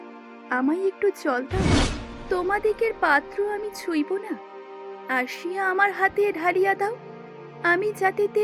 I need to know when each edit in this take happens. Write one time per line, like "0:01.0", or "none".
0:01.7